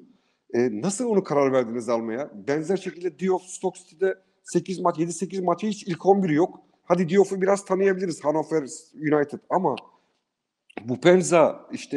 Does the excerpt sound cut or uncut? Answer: uncut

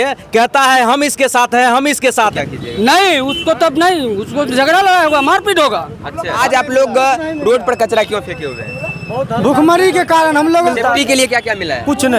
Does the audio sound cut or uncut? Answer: cut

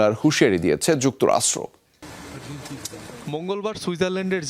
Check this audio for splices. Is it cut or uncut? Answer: cut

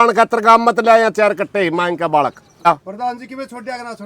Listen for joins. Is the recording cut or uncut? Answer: cut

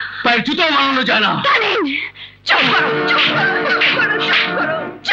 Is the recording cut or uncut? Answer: uncut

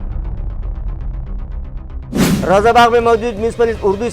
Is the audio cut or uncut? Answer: uncut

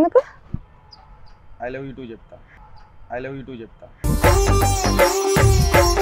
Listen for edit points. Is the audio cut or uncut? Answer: uncut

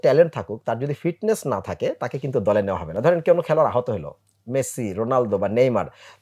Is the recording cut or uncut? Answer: uncut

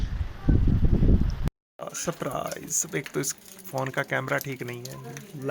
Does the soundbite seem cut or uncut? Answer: cut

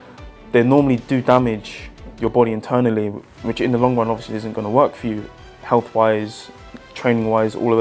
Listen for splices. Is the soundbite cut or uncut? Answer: cut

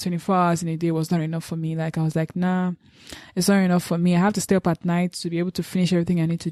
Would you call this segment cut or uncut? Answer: uncut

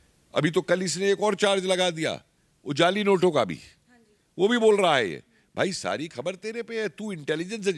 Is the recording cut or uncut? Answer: uncut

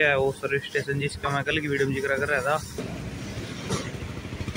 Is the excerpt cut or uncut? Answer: cut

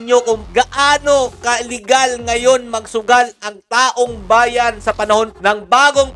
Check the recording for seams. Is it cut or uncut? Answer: uncut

